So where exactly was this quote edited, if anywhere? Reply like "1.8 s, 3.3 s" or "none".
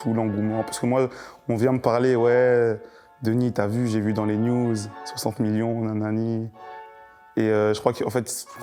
none

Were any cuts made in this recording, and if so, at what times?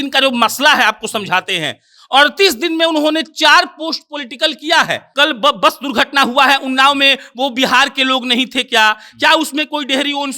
5.1 s

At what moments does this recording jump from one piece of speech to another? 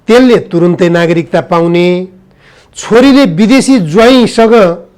none

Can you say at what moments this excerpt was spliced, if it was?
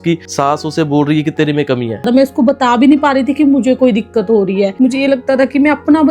2.0 s

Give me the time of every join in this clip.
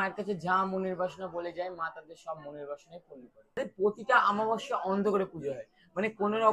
3.6 s

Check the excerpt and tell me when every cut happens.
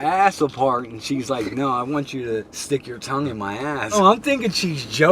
2.5 s, 3.9 s

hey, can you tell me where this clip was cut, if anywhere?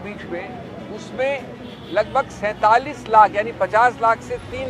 none

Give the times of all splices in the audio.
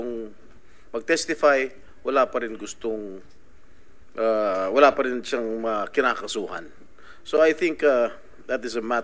none

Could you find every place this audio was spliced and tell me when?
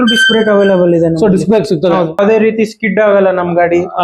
2.2 s

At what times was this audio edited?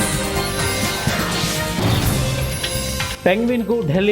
3.1 s

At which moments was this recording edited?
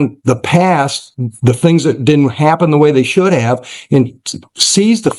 none

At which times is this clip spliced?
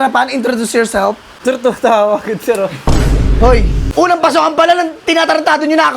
1.3 s, 3.8 s

